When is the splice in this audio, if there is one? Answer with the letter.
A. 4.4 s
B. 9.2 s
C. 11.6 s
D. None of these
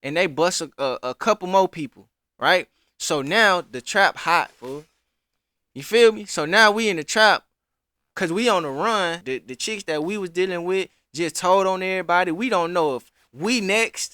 B